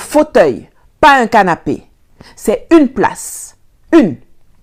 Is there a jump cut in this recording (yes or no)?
no